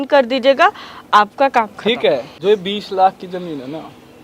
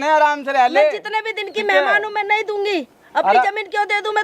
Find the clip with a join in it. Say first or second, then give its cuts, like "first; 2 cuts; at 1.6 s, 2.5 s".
first; 1 cut; at 2.3 s